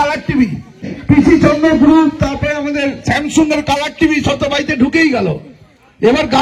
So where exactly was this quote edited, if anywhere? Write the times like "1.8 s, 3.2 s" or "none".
1.0 s